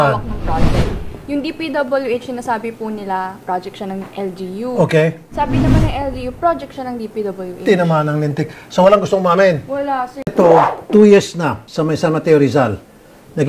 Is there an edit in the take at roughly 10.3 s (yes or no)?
yes